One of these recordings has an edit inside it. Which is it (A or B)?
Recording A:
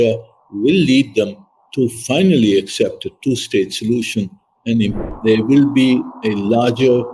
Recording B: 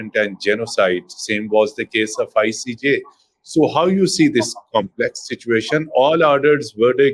A